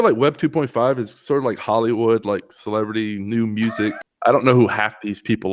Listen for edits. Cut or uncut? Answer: cut